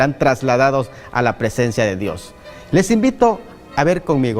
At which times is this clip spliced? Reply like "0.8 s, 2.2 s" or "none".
2.3 s